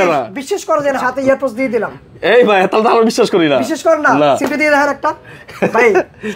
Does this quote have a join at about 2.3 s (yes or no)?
no